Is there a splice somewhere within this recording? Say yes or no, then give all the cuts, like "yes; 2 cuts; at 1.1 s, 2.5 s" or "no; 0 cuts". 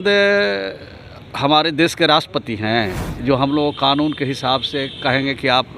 yes; 1 cut; at 3.0 s